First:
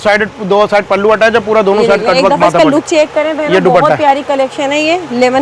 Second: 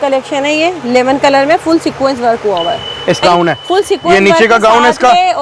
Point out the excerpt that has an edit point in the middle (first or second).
second